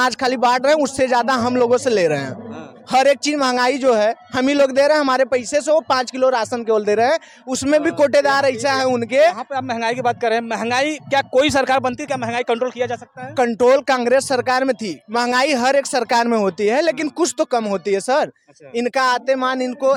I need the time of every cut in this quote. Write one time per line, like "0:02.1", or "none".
none